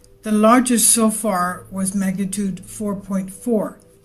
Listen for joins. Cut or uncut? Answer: cut